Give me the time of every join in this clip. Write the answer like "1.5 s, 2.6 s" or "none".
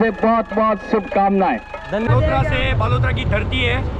2.1 s